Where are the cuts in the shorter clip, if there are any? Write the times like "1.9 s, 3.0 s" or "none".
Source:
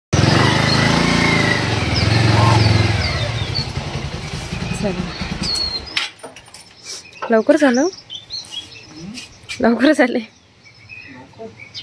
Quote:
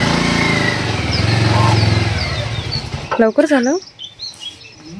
2.9 s

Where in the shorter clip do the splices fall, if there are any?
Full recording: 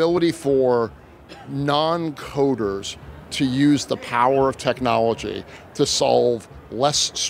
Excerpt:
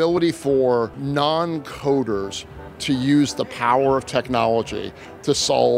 1.0 s

